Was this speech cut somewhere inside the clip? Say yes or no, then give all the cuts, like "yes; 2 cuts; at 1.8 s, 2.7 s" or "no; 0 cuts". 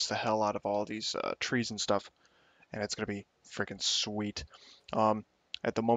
yes; 1 cut; at 3.0 s